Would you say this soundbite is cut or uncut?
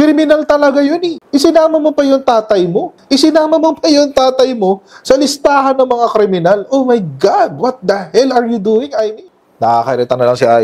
cut